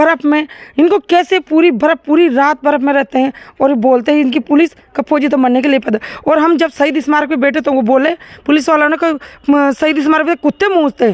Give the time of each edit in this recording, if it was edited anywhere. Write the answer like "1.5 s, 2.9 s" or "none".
none